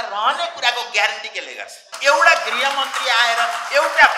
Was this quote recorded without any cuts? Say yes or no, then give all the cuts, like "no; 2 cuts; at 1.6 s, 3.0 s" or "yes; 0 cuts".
no; 1 cut; at 1.9 s